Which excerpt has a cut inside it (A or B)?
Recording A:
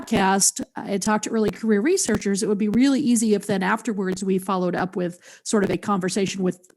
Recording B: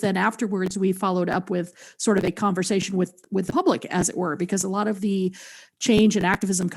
A